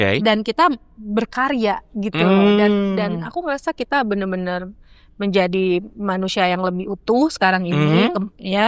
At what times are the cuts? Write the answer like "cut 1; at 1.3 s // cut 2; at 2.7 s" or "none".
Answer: none